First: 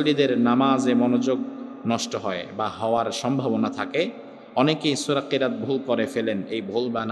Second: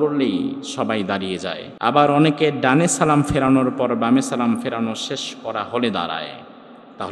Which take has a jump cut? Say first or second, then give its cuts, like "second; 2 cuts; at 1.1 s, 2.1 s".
second; 1 cut; at 1.7 s